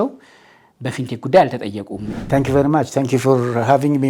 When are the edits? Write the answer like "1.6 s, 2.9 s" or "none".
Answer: 2.0 s